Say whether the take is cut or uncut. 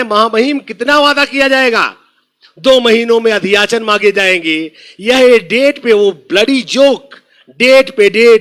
uncut